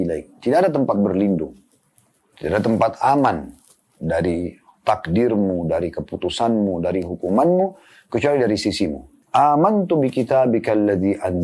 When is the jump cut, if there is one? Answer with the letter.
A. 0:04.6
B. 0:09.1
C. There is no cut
B